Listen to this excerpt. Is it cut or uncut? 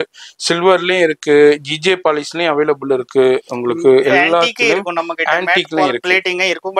uncut